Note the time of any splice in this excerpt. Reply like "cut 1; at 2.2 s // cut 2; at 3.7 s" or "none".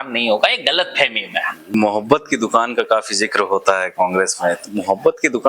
cut 1; at 1.7 s